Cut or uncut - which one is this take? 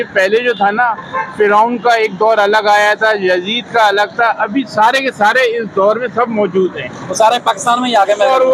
uncut